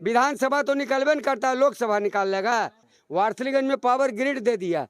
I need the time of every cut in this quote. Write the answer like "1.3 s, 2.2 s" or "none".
2.9 s